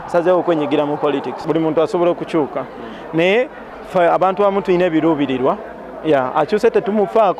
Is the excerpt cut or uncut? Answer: cut